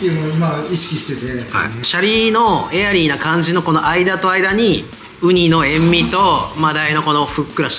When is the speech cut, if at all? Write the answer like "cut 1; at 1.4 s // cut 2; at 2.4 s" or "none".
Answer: cut 1; at 1.8 s